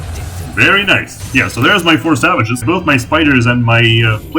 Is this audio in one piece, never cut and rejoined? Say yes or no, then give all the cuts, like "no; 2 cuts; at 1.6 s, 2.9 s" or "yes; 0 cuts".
no; 2 cuts; at 1.2 s, 2.6 s